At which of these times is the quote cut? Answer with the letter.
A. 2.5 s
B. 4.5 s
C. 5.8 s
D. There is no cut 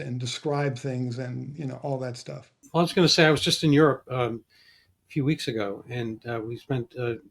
A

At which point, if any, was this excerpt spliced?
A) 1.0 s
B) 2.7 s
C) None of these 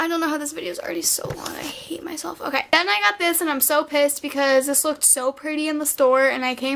B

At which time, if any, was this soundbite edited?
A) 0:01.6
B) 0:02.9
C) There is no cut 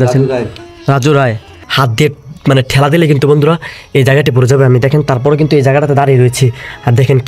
A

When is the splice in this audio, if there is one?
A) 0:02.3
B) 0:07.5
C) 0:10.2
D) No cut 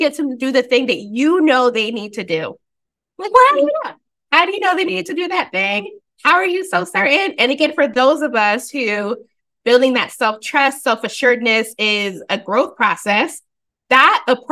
D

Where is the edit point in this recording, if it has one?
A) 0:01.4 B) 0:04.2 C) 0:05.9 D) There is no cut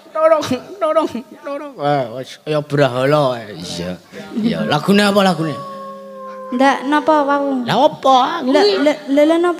B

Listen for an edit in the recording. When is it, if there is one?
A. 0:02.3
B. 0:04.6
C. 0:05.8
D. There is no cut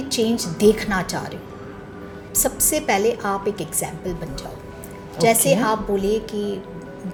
D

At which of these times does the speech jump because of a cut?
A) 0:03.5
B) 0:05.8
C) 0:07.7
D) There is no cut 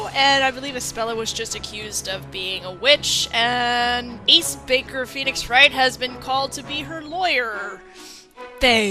B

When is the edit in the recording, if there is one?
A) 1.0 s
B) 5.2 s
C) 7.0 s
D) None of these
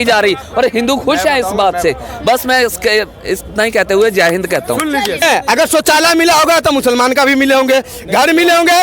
B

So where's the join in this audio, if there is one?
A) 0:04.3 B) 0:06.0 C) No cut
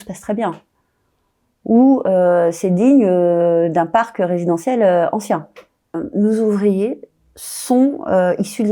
B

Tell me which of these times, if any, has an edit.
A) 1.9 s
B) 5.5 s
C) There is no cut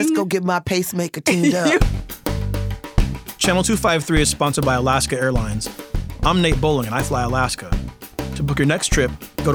A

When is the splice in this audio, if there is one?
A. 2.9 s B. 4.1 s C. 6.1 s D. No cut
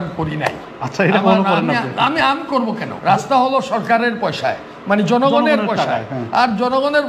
A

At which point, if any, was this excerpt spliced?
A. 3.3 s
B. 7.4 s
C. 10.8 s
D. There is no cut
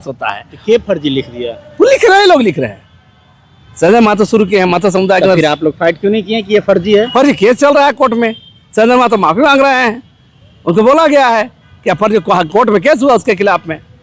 D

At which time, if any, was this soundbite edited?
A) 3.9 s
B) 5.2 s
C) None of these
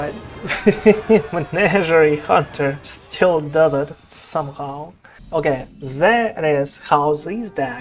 B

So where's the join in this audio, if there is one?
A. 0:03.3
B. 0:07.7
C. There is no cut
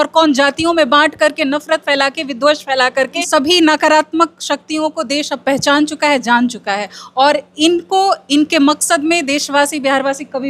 A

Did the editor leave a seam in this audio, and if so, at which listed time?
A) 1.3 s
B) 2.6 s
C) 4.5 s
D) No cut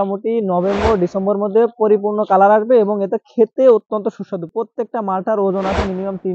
C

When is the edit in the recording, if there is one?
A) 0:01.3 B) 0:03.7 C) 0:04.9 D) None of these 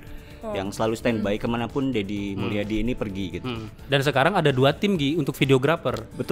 B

